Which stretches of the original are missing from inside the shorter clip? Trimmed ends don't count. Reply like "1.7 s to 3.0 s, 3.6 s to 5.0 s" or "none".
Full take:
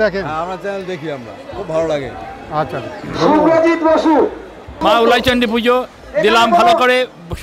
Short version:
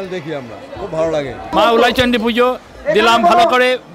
2.1 s to 4.7 s